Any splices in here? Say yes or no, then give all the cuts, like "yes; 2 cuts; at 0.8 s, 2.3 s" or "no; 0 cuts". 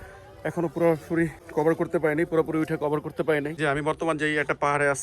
yes; 2 cuts; at 1.4 s, 3.6 s